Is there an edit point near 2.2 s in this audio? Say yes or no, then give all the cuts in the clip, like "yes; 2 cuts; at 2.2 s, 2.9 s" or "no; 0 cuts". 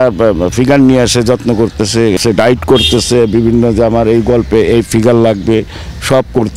yes; 1 cut; at 2.2 s